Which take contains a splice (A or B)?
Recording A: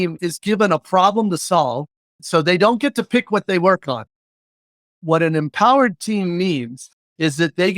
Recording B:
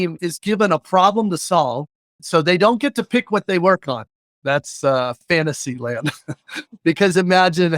A